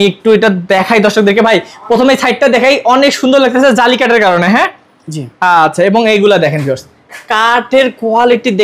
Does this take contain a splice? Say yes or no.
no